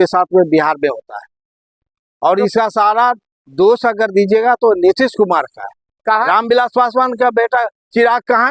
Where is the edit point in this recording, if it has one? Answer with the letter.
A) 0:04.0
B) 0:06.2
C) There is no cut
B